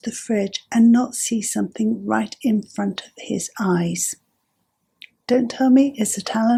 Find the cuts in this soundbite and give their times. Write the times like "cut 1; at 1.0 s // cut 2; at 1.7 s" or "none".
none